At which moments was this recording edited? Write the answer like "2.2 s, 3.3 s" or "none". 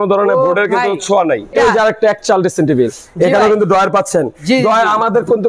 1.5 s